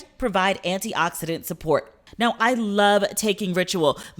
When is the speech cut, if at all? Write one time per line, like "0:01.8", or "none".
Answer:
0:02.0